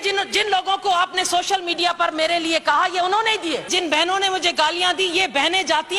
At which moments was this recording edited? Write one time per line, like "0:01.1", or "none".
0:03.7